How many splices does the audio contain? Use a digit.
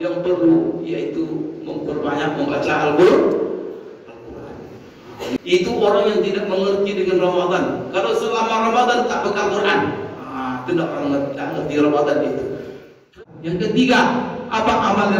2